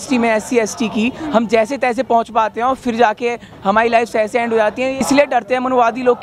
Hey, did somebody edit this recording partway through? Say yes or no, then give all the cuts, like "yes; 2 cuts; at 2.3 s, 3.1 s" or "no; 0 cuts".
yes; 1 cut; at 5.0 s